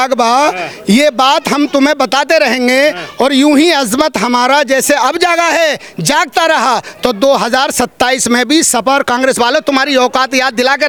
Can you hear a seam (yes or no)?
no